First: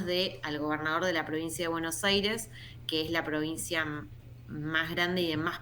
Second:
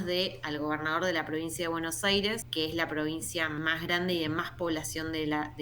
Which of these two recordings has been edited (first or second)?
second